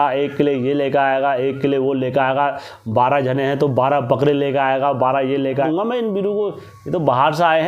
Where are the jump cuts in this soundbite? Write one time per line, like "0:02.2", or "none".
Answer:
0:05.7

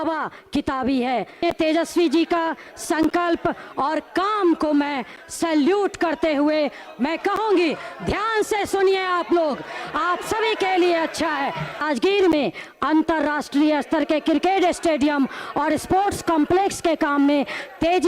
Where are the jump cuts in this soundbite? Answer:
0:01.4
0:11.8

